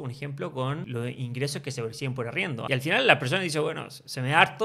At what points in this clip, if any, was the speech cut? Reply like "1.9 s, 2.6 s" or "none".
0.9 s, 2.6 s